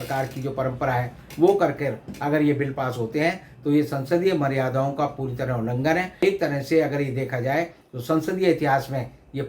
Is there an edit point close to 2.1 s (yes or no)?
no